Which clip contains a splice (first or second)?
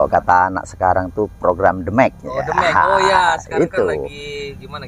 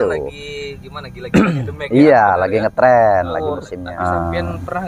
second